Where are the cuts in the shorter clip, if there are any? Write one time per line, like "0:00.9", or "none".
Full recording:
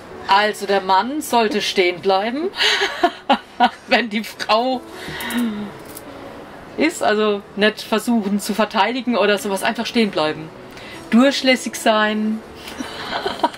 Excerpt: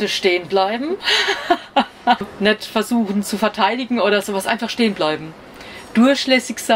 0:02.3